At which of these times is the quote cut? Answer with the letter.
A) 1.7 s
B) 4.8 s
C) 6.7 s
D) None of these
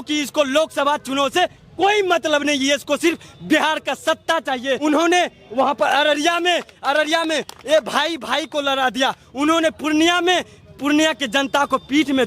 B